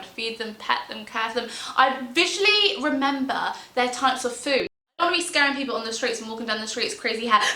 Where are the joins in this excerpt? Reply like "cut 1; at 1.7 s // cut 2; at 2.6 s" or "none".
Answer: cut 1; at 5.0 s